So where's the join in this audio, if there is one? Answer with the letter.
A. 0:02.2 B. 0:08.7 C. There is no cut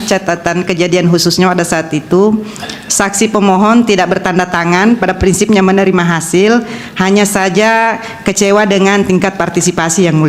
C